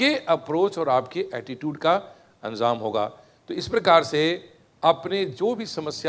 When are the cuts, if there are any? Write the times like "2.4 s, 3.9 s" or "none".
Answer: none